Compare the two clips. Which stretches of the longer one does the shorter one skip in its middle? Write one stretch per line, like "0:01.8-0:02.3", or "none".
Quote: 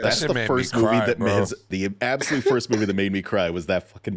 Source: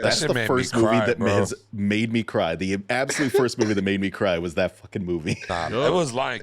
0:01.7-0:02.6